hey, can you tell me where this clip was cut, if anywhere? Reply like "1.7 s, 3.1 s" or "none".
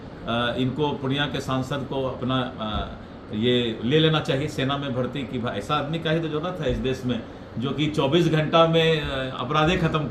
none